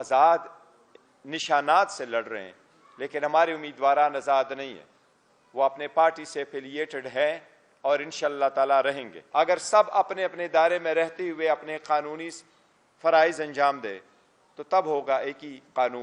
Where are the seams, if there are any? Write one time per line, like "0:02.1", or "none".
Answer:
0:09.1